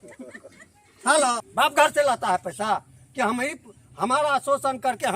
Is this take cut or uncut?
cut